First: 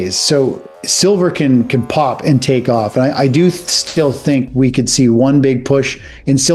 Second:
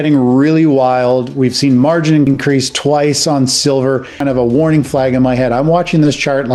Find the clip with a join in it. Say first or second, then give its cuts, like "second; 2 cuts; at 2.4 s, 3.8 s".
second; 2 cuts; at 2.3 s, 4.1 s